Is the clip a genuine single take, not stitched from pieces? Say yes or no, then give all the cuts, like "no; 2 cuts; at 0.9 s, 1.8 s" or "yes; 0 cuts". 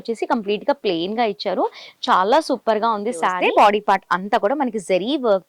no; 1 cut; at 3.4 s